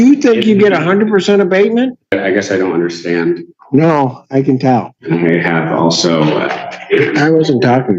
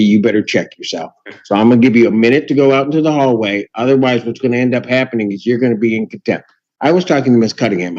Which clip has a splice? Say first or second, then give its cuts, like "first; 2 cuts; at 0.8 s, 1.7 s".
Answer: first; 2 cuts; at 2.1 s, 5.0 s